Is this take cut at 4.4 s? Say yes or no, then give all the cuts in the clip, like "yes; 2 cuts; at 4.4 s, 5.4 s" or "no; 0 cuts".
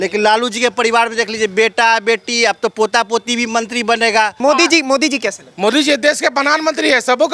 yes; 1 cut; at 4.4 s